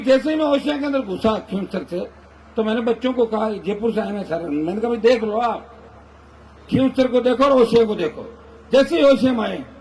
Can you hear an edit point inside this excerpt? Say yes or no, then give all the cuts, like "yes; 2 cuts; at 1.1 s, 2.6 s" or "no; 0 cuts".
no; 0 cuts